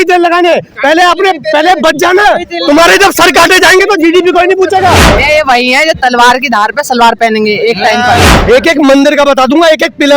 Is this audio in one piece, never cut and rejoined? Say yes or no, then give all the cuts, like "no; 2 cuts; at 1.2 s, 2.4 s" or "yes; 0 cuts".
no; 2 cuts; at 5.2 s, 8.3 s